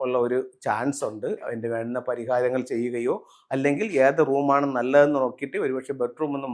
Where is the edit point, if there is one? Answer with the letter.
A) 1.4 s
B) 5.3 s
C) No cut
A